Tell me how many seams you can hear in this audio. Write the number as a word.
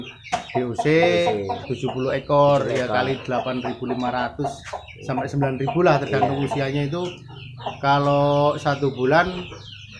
one